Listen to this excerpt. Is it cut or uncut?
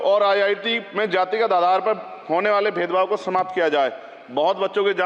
uncut